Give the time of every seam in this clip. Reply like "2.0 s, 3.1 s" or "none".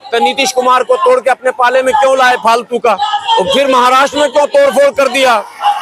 3.2 s